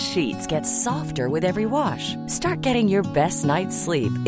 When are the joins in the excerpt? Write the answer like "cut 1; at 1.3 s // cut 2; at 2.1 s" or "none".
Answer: none